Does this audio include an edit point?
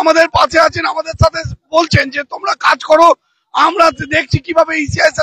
no; 0 cuts

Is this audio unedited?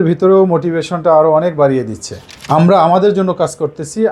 no; 1 cut; at 2.4 s

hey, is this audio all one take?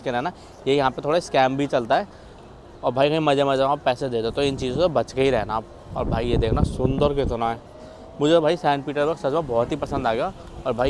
yes; 0 cuts

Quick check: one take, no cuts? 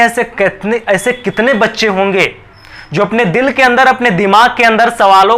yes; 0 cuts

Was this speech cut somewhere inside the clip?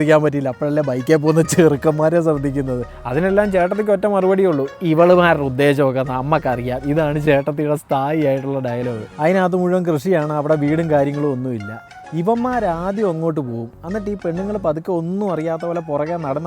yes; 2 cuts; at 2.8 s, 9.1 s

